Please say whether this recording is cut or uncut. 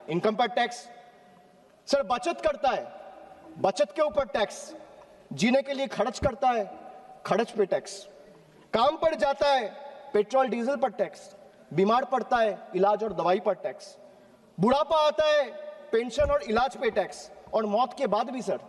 uncut